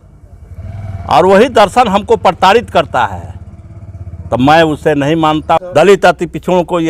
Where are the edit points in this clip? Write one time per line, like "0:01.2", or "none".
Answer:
0:05.6